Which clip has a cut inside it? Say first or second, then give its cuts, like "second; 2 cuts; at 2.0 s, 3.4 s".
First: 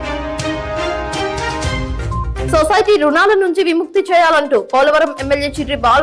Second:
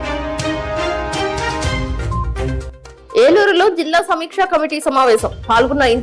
first; 1 cut; at 2.5 s